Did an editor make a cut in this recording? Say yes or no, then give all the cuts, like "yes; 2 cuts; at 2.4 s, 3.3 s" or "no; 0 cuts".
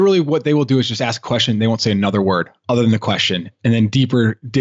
no; 0 cuts